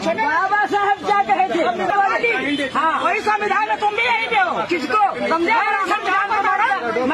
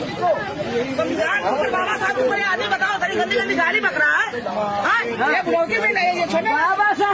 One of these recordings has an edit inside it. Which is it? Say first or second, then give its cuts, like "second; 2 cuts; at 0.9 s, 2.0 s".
first; 1 cut; at 1.9 s